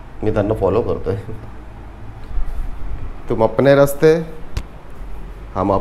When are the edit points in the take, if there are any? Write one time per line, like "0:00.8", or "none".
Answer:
0:02.2